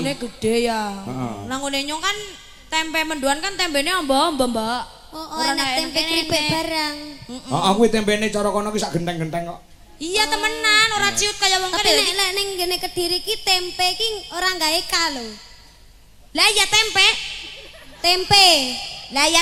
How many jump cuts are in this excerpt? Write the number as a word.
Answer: zero